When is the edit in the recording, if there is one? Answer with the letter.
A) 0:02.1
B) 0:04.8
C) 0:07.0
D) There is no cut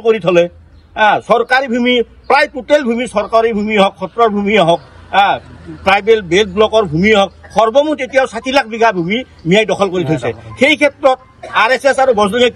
D